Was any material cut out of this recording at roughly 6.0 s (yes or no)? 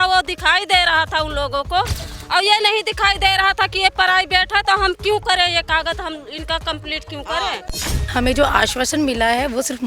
no